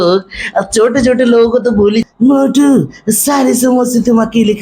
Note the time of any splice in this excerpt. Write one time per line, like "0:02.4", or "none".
0:02.1